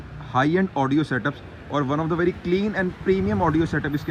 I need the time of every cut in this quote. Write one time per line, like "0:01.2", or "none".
none

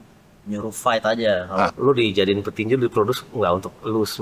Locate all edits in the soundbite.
0:01.7

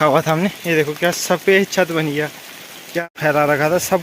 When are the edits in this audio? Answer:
0:03.0

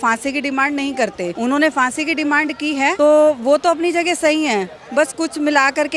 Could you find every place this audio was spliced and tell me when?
0:01.3
0:02.9

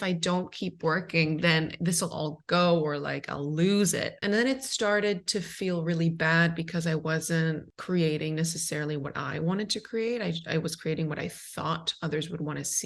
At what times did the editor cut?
0:04.1
0:07.7

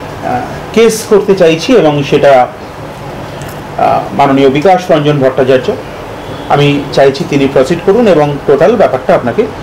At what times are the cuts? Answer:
none

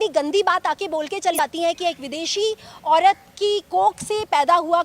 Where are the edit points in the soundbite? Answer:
0:01.4

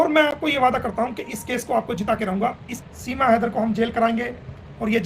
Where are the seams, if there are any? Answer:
0:02.7

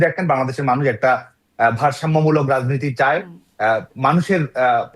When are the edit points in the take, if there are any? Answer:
none

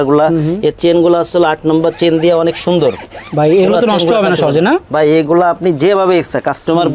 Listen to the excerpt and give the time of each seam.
none

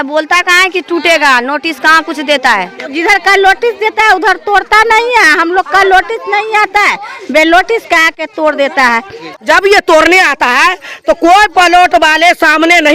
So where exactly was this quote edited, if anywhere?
0:02.9
0:09.2

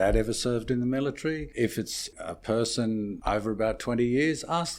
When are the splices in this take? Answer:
0:02.1
0:03.2

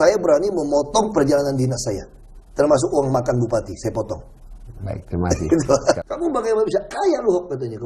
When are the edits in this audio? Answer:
0:06.0

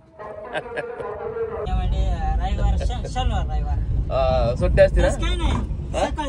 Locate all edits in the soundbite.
0:01.7

